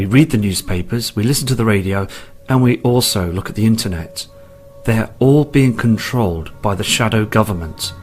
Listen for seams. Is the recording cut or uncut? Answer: cut